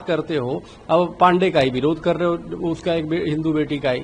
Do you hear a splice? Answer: no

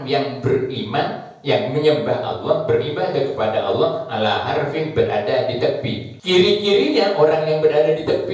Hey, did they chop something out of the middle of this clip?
yes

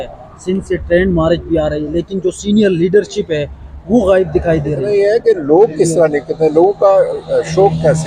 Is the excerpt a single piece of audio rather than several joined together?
no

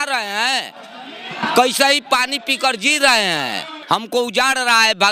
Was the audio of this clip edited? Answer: yes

